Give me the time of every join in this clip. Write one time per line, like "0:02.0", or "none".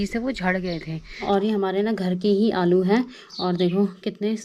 0:01.3

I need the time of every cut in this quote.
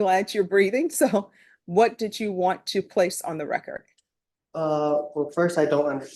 none

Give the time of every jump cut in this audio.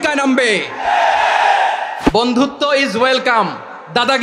0:02.0

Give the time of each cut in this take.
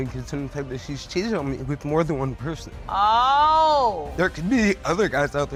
none

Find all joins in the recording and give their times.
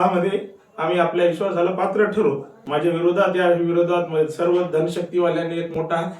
0:02.5

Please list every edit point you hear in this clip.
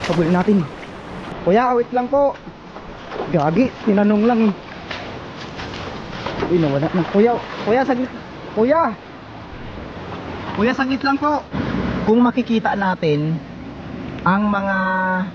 0:11.6

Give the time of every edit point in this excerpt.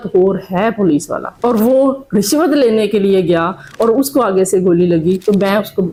none

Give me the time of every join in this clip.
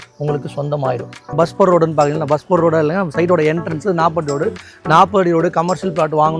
0:01.3

